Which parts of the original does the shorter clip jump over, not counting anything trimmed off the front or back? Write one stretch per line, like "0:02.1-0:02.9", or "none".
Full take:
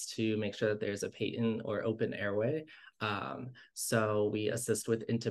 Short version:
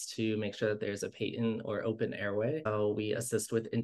0:02.7-0:04.0